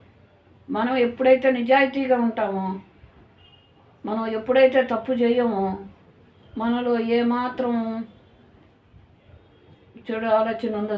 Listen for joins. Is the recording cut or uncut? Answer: uncut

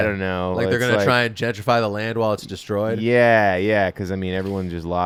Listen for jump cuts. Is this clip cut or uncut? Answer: uncut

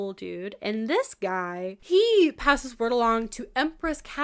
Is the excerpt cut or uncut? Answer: cut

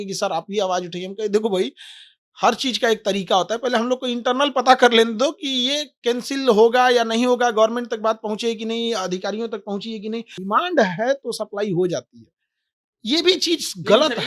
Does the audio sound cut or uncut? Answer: cut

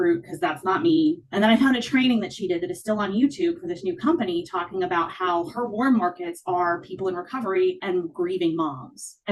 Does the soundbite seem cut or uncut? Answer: cut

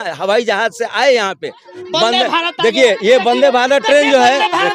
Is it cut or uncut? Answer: uncut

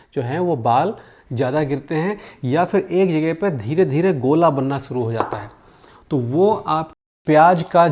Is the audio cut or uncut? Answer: cut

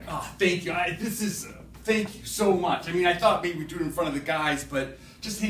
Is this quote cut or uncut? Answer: cut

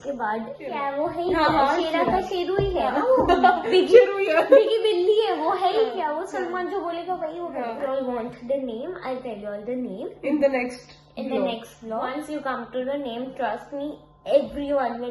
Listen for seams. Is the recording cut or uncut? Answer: cut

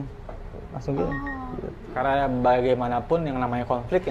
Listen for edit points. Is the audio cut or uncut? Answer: cut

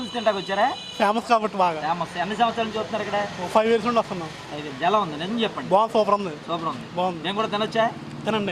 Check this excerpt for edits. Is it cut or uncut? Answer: uncut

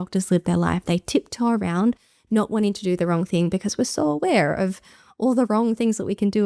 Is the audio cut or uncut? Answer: uncut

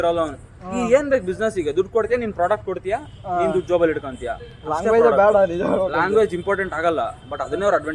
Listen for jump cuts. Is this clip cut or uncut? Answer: uncut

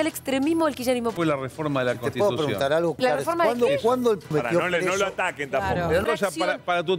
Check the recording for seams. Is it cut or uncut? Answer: cut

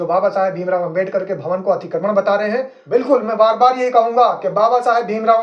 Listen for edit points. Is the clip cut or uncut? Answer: cut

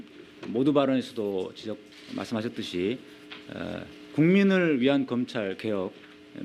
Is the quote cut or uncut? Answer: uncut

